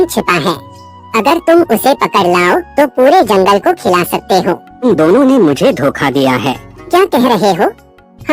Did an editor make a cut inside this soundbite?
yes; 2 cuts; at 4.8 s, 6.9 s

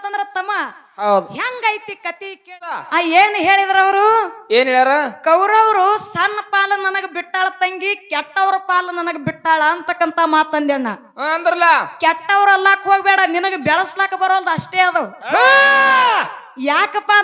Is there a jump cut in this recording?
yes; 1 cut; at 2.8 s

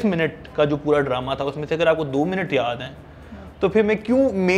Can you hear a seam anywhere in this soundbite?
no; 0 cuts

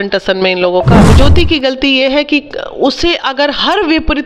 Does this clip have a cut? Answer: yes; 1 cut; at 1.1 s

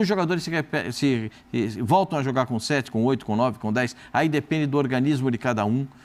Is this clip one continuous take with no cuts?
yes; 0 cuts

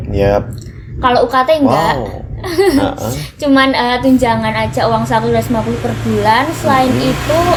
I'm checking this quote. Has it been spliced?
no; 0 cuts

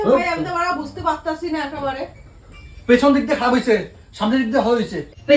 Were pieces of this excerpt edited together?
no; 0 cuts

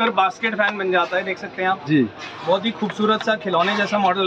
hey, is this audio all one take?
yes; 0 cuts

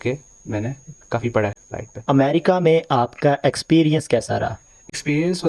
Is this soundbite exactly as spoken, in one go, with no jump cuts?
yes; 0 cuts

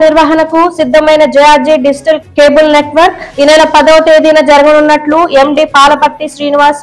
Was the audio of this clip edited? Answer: no; 0 cuts

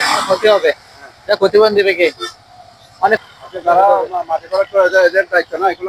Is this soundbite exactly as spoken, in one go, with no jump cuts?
no; 1 cut; at 3.2 s

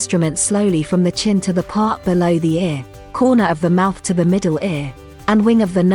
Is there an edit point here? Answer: no; 0 cuts

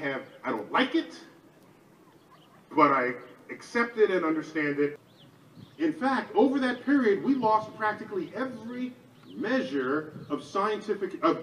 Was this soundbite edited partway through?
yes; 1 cut; at 5.0 s

